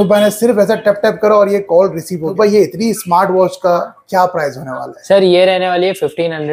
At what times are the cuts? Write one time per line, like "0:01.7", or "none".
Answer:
0:02.3